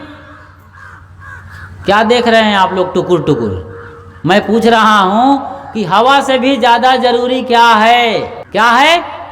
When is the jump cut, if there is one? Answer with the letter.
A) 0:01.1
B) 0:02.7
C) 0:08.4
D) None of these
C